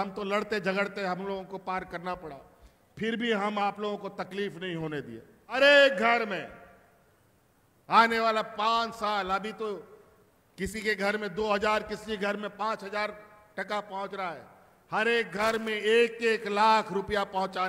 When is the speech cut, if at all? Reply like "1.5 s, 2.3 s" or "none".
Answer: 5.6 s